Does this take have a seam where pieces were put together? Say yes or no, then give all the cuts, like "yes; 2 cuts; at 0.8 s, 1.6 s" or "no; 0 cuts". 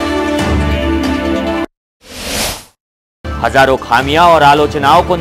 yes; 2 cuts; at 1.6 s, 3.4 s